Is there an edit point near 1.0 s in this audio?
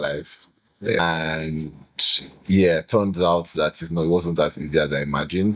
yes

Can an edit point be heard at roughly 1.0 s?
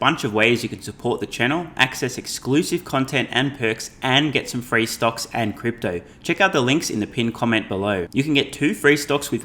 no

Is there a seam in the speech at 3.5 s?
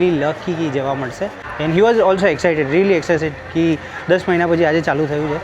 no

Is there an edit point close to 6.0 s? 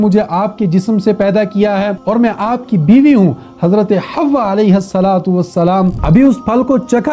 yes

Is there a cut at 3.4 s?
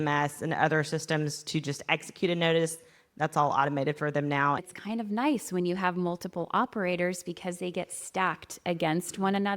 no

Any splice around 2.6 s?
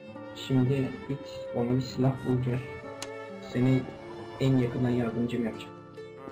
no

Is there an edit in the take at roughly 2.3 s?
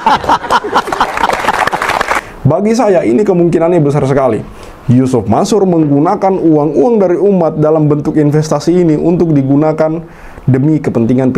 yes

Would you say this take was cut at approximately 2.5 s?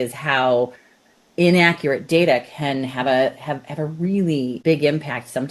no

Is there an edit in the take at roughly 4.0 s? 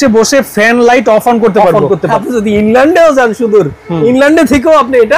no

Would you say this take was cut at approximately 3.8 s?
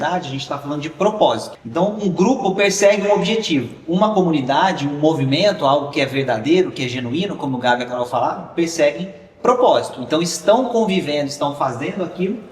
no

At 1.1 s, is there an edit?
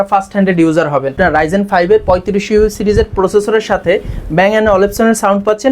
yes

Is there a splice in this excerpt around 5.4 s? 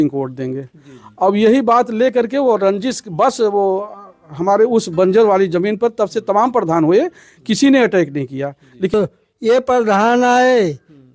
no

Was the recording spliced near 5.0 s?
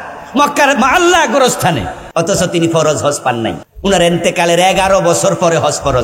no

